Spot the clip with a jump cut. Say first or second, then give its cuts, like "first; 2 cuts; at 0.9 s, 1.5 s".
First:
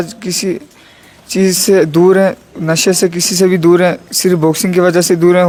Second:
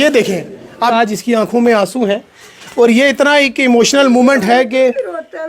second; 1 cut; at 0.9 s